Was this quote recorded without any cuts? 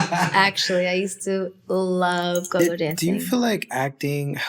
no; 1 cut; at 2.8 s

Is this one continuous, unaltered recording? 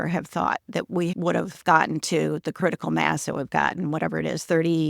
no; 1 cut; at 1.1 s

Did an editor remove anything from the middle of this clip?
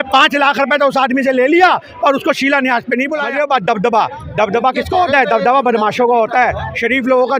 yes; 1 cut; at 3.2 s

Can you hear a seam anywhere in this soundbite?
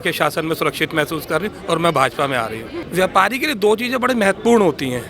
yes; 1 cut; at 2.8 s

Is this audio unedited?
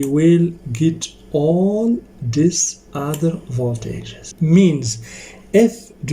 no; 1 cut; at 4.3 s

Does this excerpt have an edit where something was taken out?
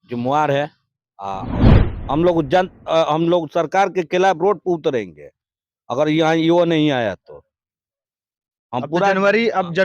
yes; 1 cut; at 1.5 s

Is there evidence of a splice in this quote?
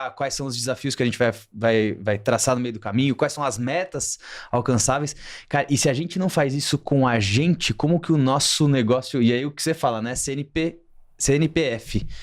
no; 0 cuts

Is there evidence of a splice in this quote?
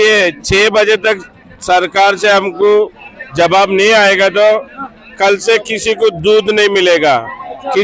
no; 0 cuts

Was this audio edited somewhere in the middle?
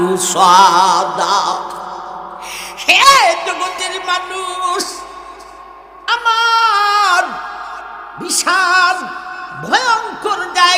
no; 0 cuts

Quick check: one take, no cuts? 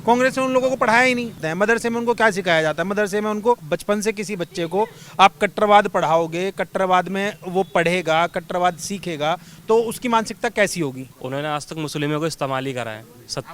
no; 3 cuts; at 1.4 s, 3.6 s, 11.1 s

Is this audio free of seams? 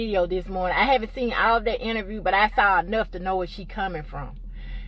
yes; 0 cuts

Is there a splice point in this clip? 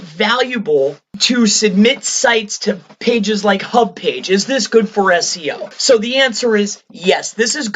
yes; 2 cuts; at 1.1 s, 5.7 s

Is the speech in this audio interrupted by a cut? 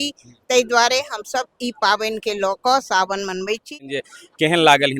yes; 1 cut; at 3.8 s

